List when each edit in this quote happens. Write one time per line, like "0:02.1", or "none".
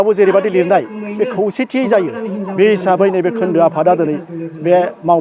none